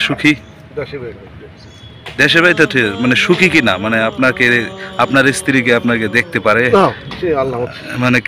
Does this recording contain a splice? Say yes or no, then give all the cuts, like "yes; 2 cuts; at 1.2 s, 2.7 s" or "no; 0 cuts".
no; 0 cuts